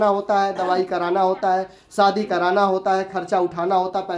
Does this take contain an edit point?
no; 0 cuts

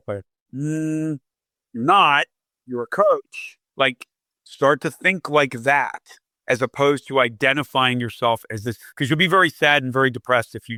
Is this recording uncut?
yes; 0 cuts

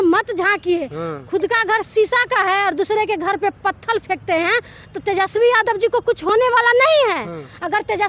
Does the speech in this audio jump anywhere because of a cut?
no; 0 cuts

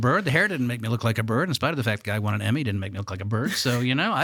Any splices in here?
no; 0 cuts

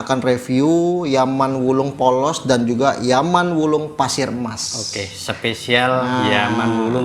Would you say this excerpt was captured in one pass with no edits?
yes; 0 cuts

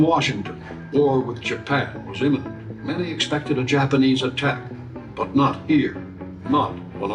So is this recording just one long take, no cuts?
yes; 0 cuts

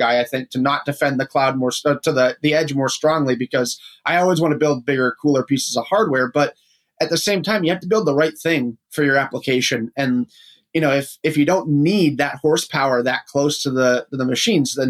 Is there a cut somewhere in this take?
no; 0 cuts

